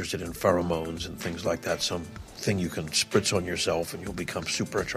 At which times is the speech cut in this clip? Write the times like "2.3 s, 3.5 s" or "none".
none